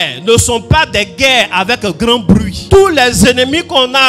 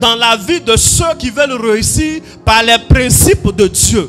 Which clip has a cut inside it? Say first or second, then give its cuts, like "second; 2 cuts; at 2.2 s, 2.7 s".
first; 1 cut; at 2.6 s